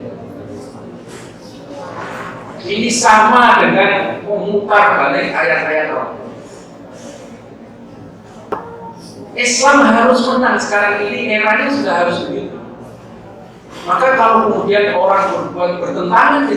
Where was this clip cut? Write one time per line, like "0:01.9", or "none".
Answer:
0:08.5